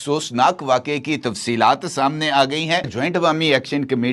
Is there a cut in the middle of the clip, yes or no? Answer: yes